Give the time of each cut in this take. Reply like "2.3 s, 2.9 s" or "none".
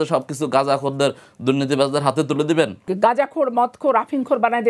2.8 s